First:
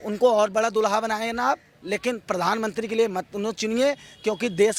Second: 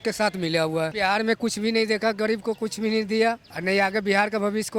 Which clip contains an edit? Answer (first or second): second